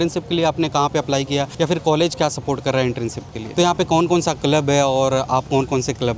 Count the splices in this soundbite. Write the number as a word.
two